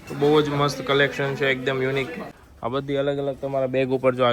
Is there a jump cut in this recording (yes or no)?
yes